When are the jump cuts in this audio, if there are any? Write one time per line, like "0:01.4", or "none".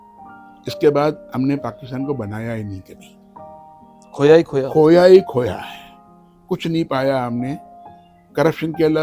none